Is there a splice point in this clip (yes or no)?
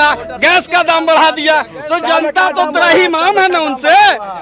no